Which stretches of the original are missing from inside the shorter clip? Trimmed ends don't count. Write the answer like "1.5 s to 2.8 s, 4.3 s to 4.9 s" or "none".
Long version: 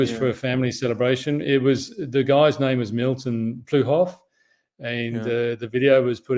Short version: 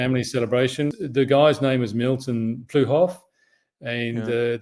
1.4 s to 1.9 s